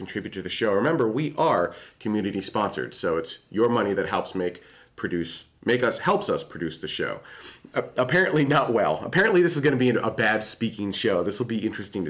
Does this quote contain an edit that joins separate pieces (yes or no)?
yes